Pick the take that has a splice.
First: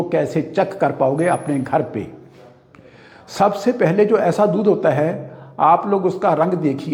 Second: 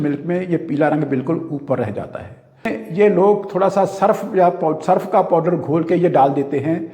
second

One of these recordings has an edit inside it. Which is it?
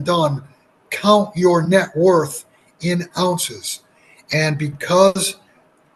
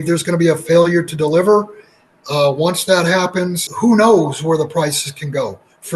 second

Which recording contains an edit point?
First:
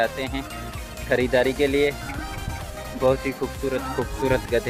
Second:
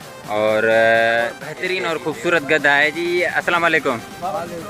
second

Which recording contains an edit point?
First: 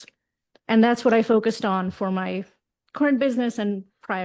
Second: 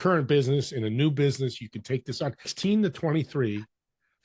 second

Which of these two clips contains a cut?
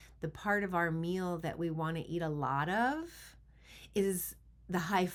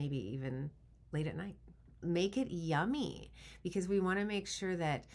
second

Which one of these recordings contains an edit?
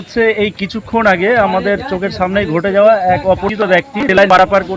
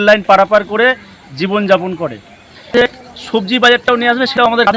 second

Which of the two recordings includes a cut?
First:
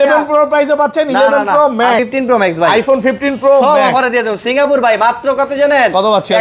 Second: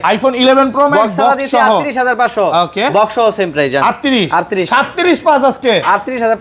first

